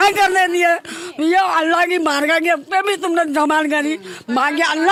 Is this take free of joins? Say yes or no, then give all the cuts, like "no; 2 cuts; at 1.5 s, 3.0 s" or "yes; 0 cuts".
yes; 0 cuts